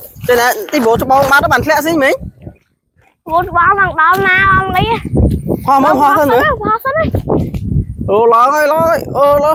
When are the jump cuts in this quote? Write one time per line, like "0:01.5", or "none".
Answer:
none